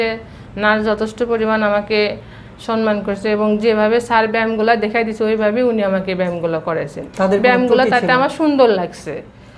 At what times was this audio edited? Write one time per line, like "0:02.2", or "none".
none